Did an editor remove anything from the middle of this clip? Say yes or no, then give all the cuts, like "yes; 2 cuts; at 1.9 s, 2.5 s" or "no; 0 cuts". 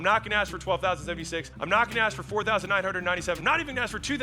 yes; 2 cuts; at 1.5 s, 3.4 s